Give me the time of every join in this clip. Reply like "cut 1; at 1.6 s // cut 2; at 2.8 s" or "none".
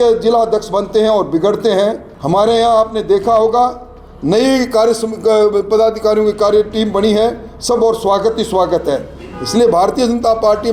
cut 1; at 2.1 s